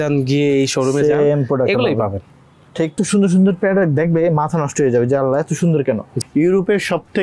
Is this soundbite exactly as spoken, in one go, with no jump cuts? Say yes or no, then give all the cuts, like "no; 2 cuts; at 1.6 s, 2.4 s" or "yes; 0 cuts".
no; 2 cuts; at 2.9 s, 6.1 s